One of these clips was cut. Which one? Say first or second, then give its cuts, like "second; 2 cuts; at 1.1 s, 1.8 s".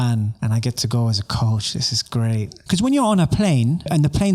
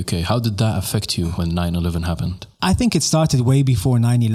first; 1 cut; at 2.6 s